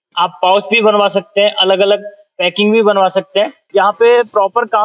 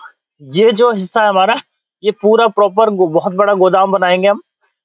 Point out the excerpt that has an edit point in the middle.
first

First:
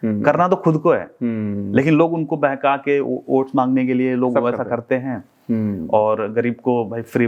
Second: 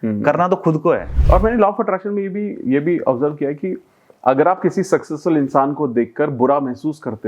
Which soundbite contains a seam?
second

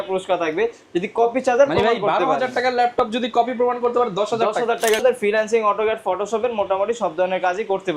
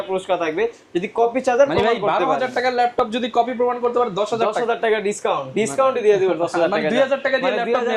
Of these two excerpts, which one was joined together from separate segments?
first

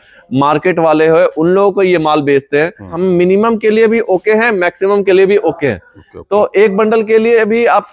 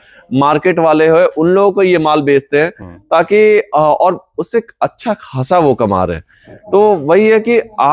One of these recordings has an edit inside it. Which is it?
first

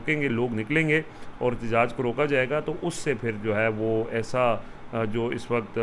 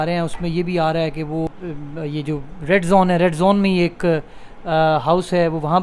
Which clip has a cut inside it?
second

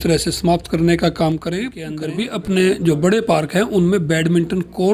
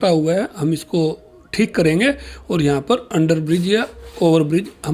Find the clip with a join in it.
first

